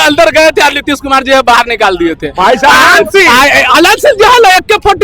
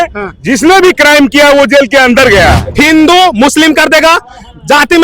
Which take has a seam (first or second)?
second